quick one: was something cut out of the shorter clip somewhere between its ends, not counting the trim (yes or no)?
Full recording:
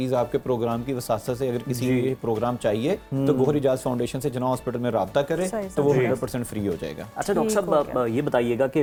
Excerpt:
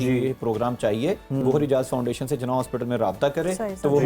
yes